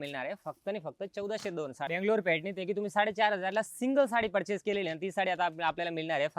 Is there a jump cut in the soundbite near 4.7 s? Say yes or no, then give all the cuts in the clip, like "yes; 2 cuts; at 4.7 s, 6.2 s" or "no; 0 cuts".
no; 1 cut; at 1.9 s